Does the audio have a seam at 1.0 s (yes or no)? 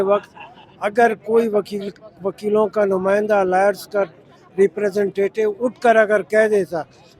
no